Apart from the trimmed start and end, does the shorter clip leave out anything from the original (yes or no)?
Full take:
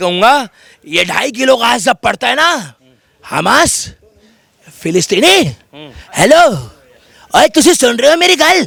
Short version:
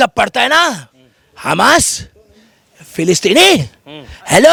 no